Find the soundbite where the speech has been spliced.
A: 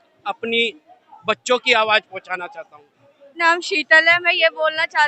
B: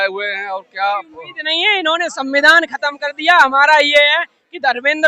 A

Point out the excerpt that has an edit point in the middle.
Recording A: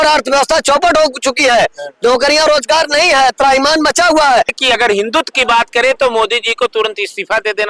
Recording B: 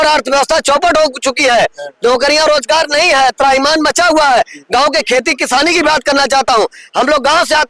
A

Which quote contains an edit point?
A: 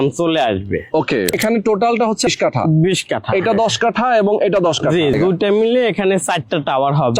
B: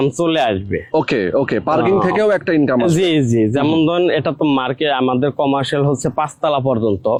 A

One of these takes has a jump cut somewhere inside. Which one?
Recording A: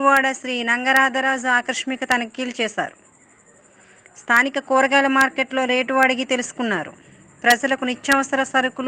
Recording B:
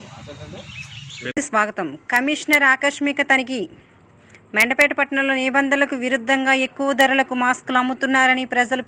B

